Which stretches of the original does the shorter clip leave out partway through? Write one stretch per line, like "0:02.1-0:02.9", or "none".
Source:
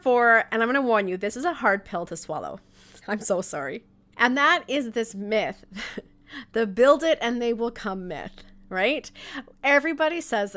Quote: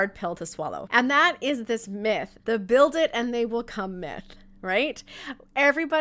0:02.5-0:04.1
0:05.6-0:06.4